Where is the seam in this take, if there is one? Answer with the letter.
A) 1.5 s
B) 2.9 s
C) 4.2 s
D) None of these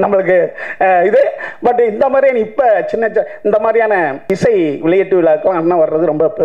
C